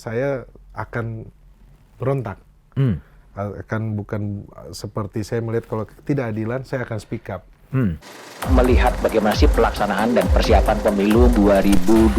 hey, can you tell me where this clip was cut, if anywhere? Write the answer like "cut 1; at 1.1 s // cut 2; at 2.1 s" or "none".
cut 1; at 8.1 s